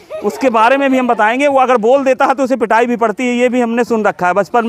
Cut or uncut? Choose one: uncut